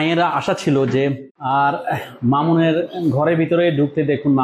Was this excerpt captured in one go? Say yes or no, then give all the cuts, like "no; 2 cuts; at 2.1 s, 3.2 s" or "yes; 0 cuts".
no; 1 cut; at 1.3 s